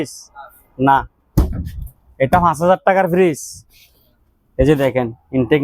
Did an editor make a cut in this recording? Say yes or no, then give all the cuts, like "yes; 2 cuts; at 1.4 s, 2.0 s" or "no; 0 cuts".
no; 0 cuts